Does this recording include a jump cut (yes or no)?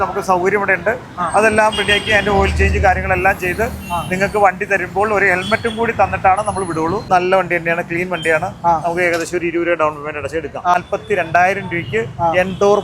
yes